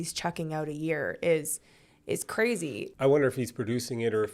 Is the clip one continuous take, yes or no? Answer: yes